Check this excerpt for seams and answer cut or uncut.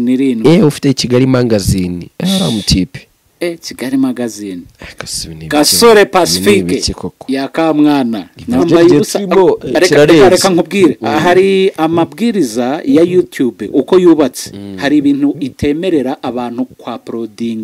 cut